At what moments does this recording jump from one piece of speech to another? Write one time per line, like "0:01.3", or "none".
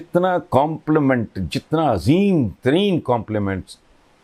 none

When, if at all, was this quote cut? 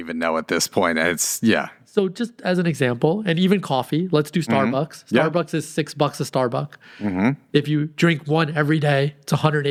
none

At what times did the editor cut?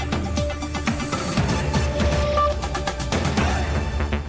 none

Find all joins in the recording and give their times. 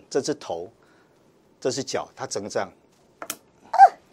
none

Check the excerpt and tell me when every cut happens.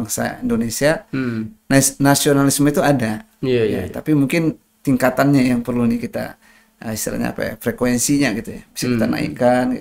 none

